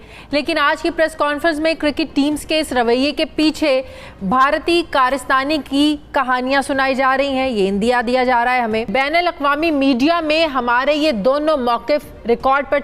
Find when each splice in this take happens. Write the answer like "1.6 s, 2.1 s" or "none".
8.9 s